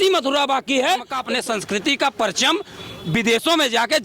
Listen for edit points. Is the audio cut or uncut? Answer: cut